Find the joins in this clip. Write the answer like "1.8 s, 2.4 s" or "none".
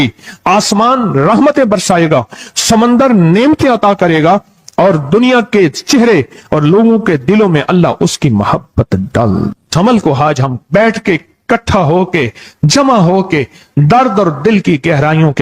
9.5 s